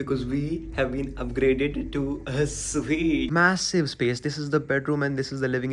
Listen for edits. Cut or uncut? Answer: cut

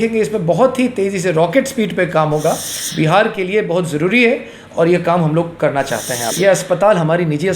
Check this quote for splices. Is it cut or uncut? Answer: cut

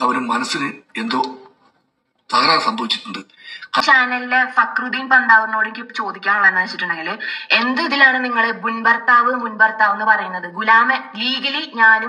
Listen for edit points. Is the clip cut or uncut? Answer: cut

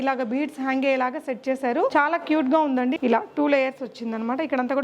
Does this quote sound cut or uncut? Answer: cut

